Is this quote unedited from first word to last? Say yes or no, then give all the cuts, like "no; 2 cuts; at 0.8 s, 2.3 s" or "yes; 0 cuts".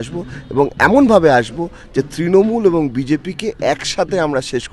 yes; 0 cuts